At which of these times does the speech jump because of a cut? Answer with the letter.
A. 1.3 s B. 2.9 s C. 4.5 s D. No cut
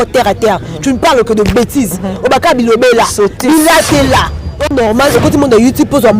C